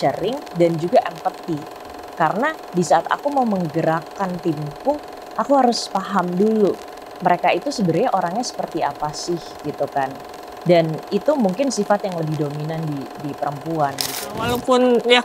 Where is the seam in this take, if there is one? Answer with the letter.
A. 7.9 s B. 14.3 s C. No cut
B